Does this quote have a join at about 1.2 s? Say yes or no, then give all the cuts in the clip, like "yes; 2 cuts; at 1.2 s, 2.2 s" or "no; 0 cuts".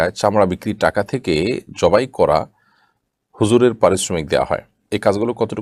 no; 0 cuts